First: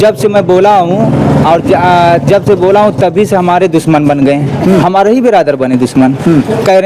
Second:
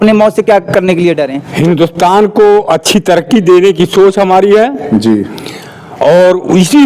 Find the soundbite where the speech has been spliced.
second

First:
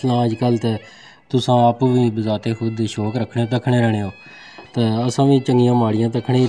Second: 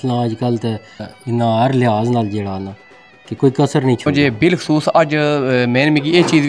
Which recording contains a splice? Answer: second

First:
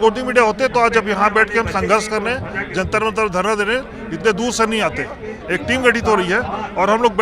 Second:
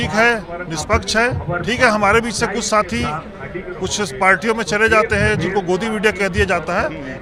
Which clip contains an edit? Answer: first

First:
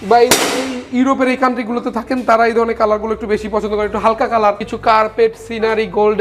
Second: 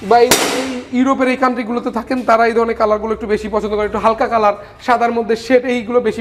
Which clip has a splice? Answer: first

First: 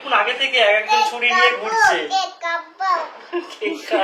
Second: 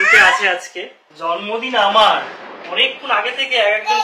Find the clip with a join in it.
second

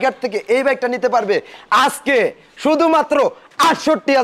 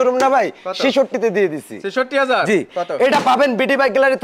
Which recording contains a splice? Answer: second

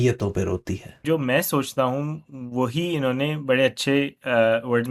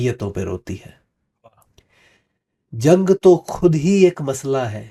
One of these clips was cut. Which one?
first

